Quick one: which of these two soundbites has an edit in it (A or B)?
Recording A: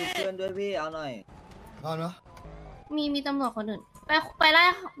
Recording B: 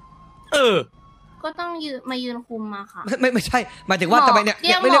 A